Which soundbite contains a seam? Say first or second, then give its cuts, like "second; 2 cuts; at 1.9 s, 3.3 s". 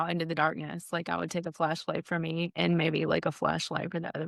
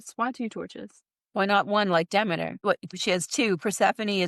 second; 1 cut; at 2.9 s